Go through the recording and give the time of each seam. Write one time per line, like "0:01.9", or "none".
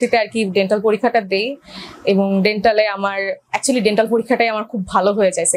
none